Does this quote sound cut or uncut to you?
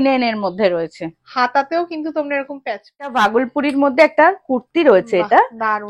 cut